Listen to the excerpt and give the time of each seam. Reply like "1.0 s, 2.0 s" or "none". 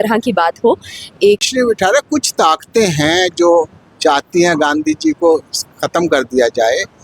1.5 s